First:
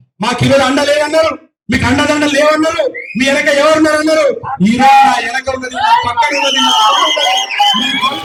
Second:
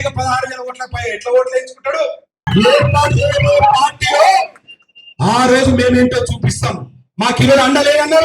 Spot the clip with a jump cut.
second; 1 cut; at 2.4 s

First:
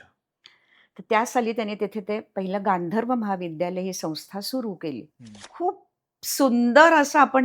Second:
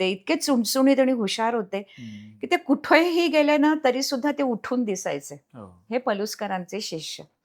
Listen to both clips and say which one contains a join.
first; 1 cut; at 5.5 s

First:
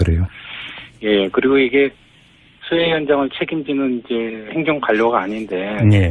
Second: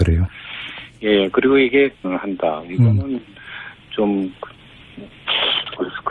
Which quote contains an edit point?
first; 1 cut; at 2.1 s

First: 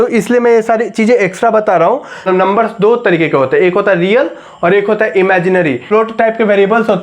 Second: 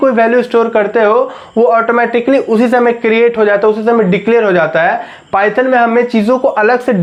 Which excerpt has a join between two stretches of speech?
first; 2 cuts; at 2.3 s, 5.8 s

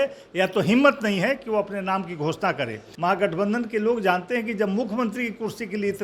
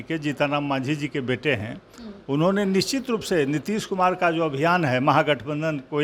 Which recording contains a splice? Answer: first; 1 cut; at 2.8 s

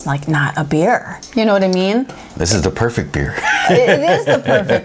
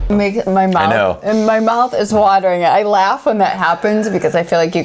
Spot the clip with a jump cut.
first; 1 cut; at 2.1 s

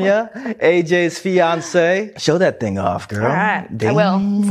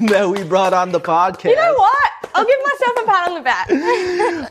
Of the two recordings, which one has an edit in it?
first; 1 cut; at 2.1 s

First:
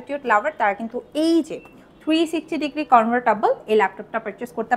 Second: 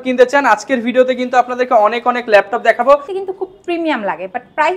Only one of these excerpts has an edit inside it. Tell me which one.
second; 1 cut; at 3.1 s

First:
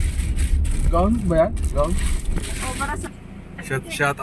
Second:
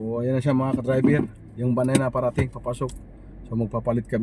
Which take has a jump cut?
first; 1 cut; at 3.1 s

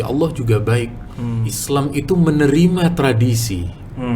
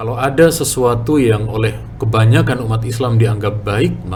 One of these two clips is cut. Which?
first; 1 cut; at 1.5 s

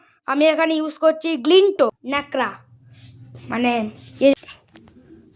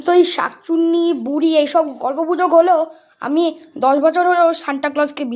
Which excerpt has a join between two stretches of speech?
first; 2 cuts; at 2.0 s, 4.3 s

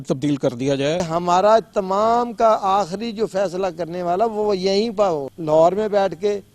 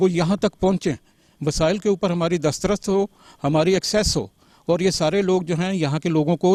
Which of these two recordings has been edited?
first; 2 cuts; at 1.0 s, 5.3 s

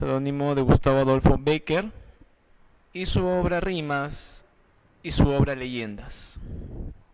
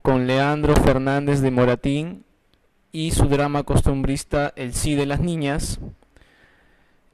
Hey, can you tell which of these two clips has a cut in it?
first; 1 cut; at 3.0 s

